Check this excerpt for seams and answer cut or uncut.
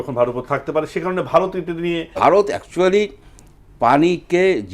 cut